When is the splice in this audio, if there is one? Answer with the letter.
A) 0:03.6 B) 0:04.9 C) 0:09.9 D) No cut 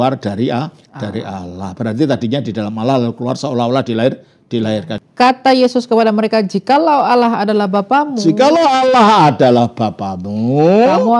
B